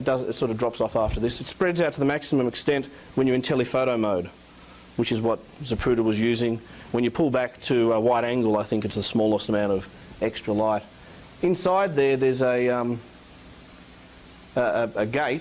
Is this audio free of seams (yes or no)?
no